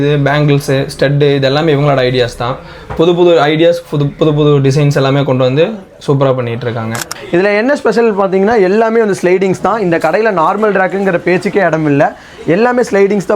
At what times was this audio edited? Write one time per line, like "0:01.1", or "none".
0:07.1